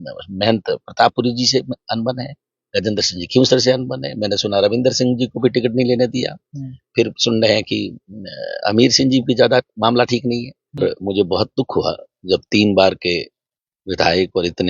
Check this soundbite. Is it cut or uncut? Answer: cut